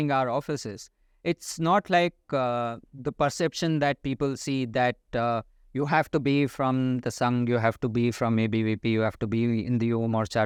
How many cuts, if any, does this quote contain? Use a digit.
0